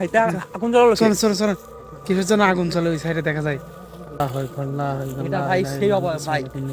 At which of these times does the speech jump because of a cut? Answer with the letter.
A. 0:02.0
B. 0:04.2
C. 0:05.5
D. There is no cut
B